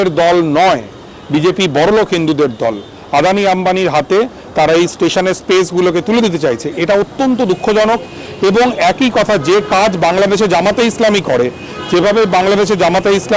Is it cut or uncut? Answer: uncut